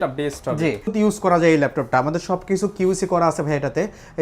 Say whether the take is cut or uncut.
cut